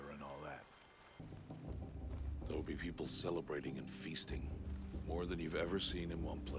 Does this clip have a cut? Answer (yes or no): yes